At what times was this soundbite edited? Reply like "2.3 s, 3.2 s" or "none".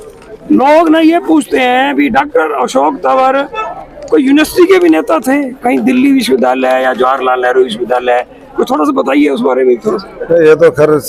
none